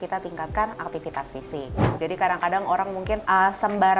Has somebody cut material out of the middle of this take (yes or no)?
yes